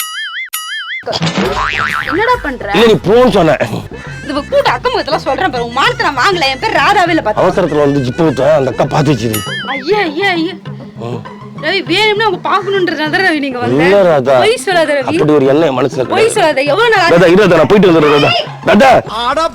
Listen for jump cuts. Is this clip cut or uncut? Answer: cut